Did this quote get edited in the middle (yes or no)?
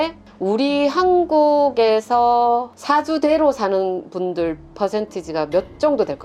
no